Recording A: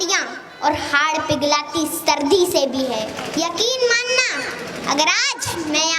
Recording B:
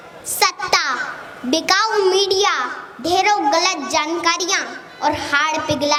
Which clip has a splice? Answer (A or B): A